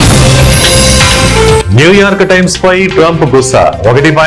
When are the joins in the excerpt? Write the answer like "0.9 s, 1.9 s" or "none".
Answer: 1.7 s